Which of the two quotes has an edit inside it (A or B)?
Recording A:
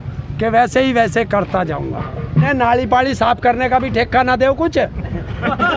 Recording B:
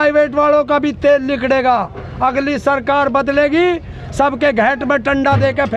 A